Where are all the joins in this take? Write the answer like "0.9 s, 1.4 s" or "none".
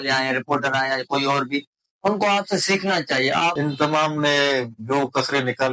3.5 s

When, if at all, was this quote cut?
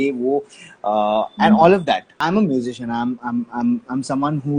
2.1 s

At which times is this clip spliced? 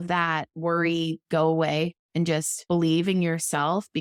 none

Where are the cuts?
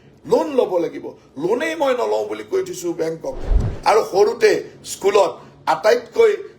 3.5 s

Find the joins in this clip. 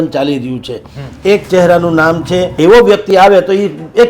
2.5 s

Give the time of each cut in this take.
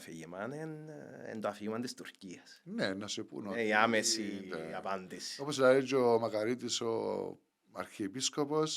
none

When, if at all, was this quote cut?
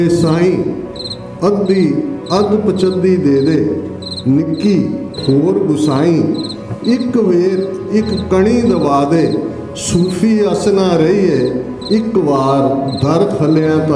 none

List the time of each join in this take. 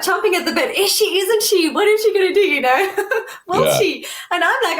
none

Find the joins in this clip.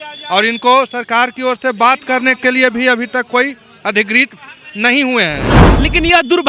5.6 s

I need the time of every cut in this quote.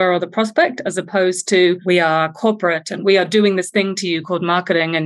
1.8 s, 3.0 s

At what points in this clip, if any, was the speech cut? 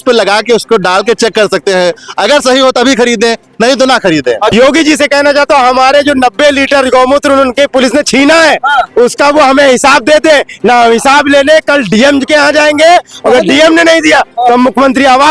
4.5 s

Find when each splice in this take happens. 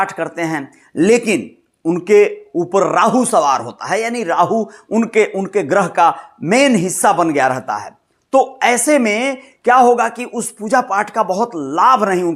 none

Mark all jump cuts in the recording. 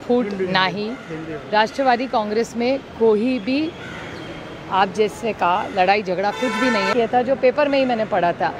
6.9 s

